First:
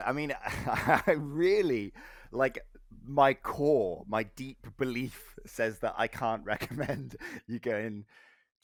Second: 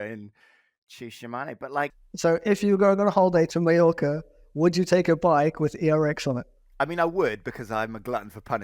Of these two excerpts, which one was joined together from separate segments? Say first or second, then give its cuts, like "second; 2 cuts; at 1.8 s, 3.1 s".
second; 3 cuts; at 2.1 s, 3.5 s, 6.6 s